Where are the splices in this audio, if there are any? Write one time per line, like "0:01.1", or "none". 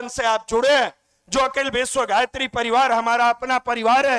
none

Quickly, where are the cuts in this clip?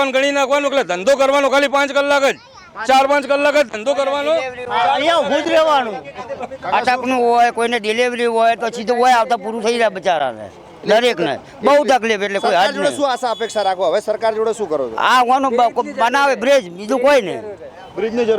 none

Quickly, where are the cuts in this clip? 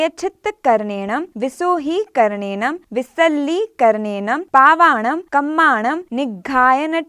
0:01.3
0:02.8
0:04.4
0:05.2
0:06.1

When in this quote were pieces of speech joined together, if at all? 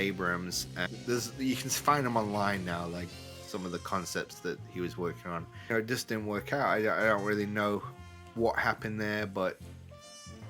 0:00.9
0:05.7

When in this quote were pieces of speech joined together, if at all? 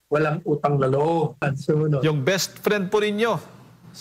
0:01.4

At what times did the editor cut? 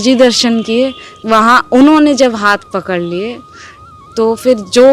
0:01.1

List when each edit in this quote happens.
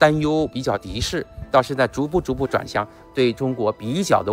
none

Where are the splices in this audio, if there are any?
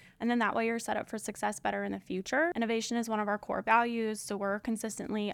0:02.5

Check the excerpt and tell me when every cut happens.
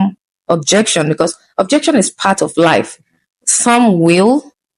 none

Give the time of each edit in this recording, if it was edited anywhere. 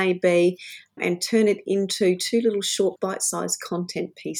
0:01.0
0:03.0

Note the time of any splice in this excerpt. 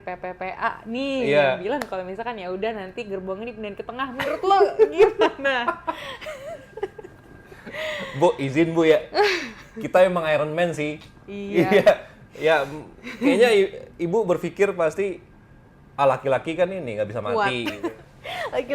0:17.7

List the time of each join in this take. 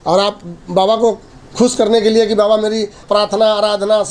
0:03.0

